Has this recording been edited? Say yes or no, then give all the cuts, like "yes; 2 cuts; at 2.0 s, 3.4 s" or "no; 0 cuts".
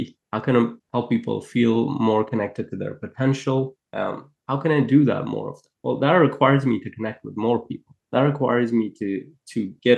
no; 0 cuts